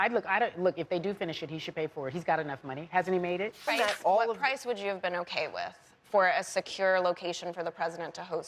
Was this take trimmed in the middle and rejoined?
yes; 1 cut; at 3.7 s

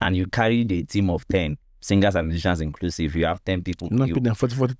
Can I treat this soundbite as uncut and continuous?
yes; 0 cuts

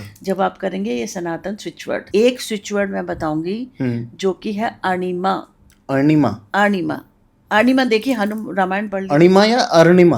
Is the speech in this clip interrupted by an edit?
yes; 1 cut; at 2.0 s

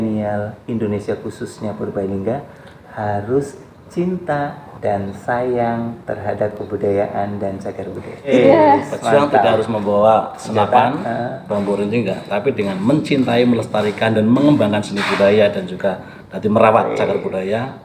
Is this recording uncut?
no; 1 cut; at 8.3 s

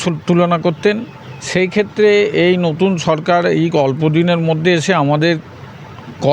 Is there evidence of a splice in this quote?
no; 0 cuts

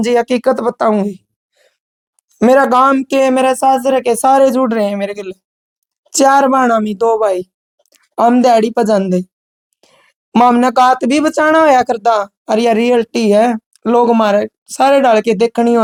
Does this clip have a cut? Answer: no; 0 cuts

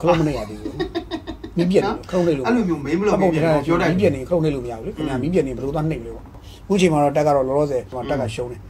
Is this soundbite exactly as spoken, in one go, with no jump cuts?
no; 1 cut; at 6.5 s

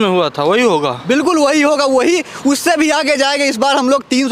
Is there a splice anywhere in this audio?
no; 0 cuts

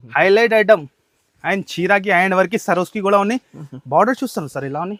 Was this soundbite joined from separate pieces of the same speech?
no; 0 cuts

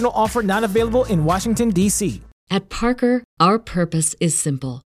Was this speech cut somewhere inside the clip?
yes; 1 cut; at 2.3 s

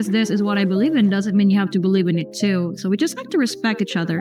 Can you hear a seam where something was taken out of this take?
no; 0 cuts

